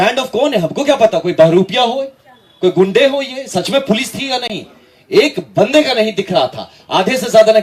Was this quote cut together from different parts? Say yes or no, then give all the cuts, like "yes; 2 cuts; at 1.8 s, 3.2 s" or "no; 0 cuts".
no; 0 cuts